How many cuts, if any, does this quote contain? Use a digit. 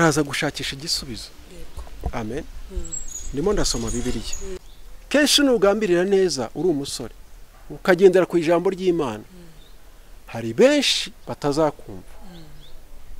1